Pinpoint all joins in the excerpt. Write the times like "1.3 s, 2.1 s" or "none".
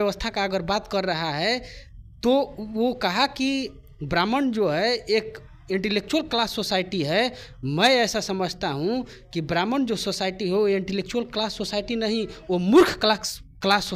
none